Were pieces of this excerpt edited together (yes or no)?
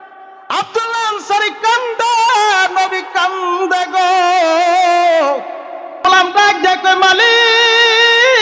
yes